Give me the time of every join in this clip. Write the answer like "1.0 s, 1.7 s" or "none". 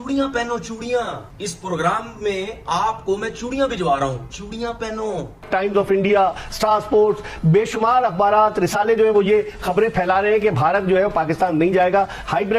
5.5 s